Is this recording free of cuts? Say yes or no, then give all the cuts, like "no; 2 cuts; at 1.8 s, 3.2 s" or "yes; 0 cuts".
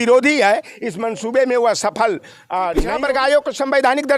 no; 1 cut; at 2.9 s